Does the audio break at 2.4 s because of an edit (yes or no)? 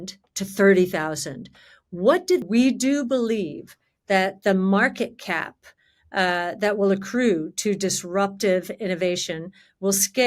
yes